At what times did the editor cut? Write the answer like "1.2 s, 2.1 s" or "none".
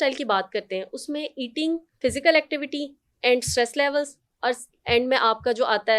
1.9 s